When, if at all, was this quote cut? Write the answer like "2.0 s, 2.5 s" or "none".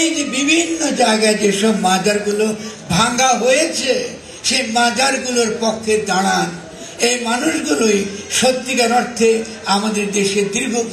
none